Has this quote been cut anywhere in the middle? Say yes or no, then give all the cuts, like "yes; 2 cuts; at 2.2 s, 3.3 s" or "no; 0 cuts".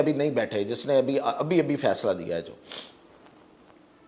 no; 0 cuts